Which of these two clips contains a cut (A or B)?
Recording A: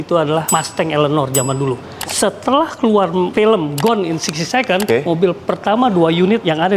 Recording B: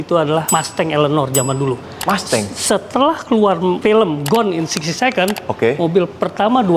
A